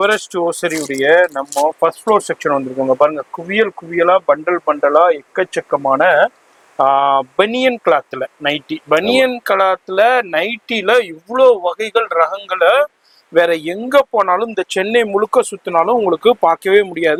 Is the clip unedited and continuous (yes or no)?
yes